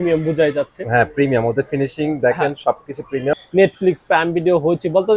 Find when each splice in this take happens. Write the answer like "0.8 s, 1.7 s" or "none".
3.3 s